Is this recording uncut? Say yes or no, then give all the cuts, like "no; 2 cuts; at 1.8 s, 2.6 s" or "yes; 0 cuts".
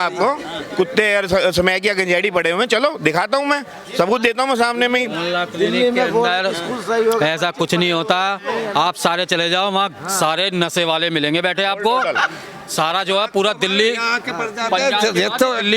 yes; 0 cuts